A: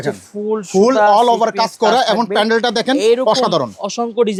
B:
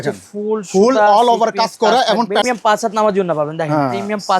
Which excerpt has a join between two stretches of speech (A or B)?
B